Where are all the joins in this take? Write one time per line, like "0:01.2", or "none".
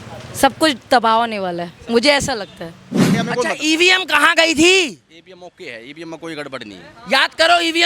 0:03.1